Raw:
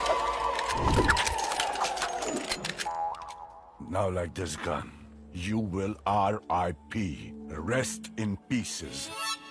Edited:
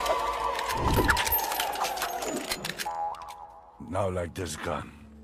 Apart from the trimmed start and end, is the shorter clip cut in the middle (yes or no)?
no